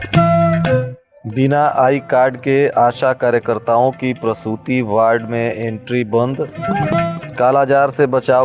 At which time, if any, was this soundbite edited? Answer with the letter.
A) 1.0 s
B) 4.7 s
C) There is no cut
A